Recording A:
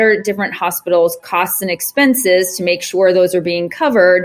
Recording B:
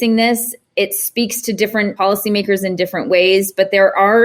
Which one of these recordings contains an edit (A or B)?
B